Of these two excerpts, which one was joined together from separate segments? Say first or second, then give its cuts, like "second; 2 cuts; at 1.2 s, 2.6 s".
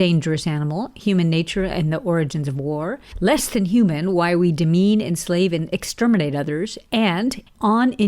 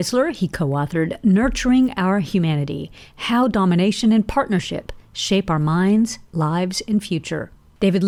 first; 1 cut; at 3.0 s